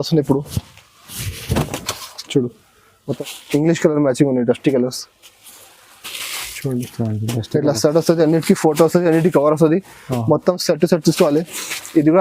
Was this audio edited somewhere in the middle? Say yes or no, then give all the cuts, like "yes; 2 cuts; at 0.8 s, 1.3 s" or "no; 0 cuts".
yes; 1 cut; at 3.2 s